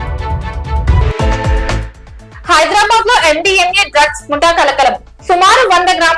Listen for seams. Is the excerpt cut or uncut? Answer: uncut